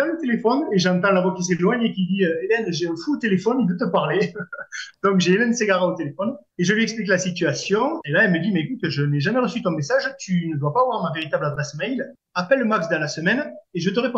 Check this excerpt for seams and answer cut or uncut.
cut